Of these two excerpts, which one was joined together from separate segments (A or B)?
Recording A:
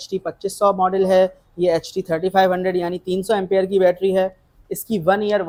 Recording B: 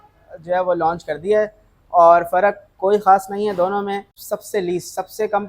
B